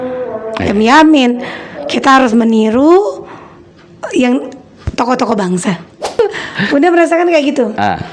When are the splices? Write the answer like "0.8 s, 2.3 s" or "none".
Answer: 6.0 s